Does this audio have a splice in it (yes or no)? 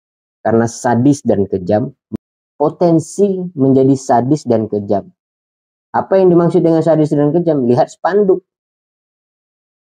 yes